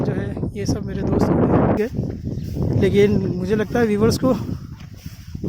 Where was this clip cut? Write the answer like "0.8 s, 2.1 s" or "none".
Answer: 1.8 s